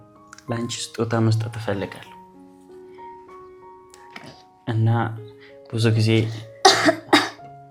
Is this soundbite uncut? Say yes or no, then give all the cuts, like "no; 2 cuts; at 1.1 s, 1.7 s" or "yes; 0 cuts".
yes; 0 cuts